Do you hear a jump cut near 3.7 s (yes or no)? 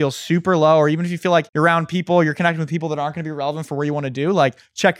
no